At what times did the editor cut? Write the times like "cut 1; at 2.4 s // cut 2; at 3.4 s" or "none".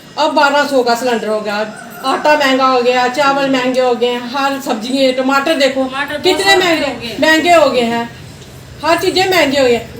none